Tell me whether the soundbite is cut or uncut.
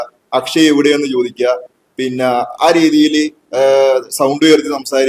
uncut